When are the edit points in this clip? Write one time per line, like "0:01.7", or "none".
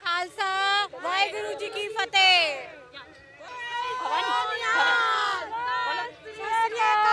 0:03.5